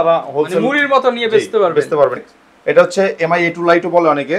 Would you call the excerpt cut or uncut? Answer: cut